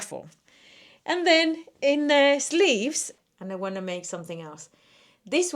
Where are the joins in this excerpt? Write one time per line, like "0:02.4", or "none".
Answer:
0:03.1

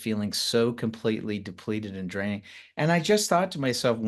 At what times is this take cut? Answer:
none

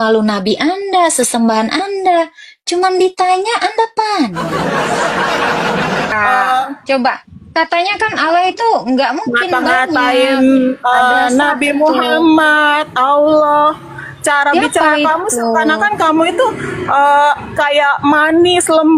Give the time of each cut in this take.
0:06.1

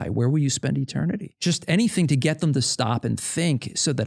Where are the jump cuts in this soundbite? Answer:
0:01.4

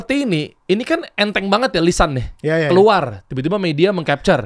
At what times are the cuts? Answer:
none

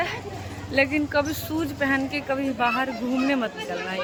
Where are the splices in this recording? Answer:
none

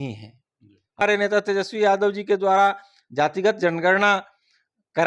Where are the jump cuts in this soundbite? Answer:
0:01.0

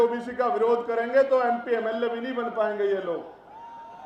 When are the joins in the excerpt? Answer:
none

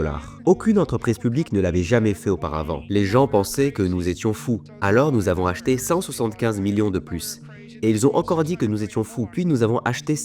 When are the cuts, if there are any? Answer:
0:02.8
0:04.7
0:09.2

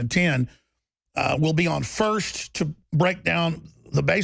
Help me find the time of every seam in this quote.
0:02.5

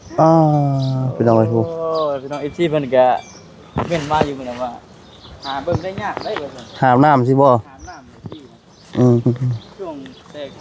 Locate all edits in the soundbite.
none

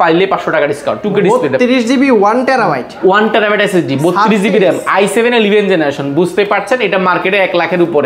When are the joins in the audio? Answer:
0:01.0

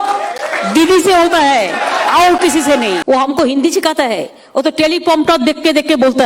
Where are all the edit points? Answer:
0:03.0

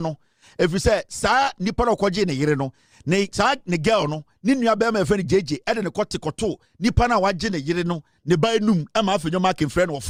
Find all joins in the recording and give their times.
none

